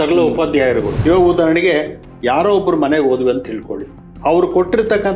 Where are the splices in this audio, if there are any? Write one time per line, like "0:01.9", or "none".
0:00.9